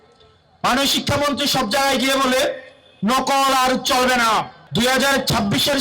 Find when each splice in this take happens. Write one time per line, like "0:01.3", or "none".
0:04.6